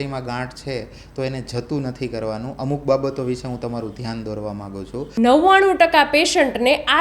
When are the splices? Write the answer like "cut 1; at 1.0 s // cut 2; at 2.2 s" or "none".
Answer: cut 1; at 5.0 s